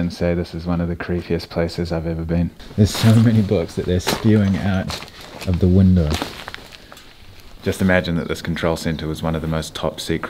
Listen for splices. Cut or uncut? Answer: cut